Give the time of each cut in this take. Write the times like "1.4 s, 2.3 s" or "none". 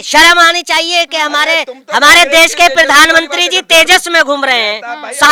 none